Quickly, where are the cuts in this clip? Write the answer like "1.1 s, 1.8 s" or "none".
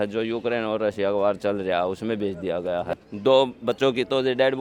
none